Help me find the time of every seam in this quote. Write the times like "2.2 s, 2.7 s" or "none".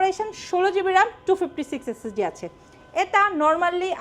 none